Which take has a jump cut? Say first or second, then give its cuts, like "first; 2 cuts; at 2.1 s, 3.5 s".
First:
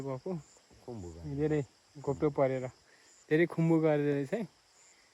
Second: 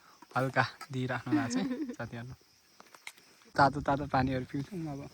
second; 1 cut; at 3.5 s